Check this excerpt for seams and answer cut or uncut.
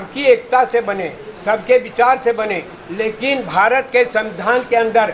uncut